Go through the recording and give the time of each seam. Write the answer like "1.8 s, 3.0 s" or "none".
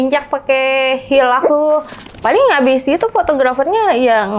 2.1 s